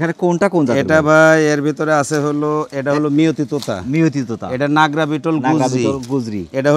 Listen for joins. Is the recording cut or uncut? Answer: uncut